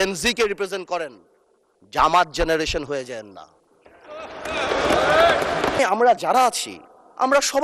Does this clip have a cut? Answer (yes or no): yes